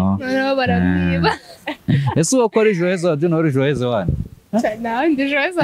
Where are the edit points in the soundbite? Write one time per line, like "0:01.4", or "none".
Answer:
0:04.3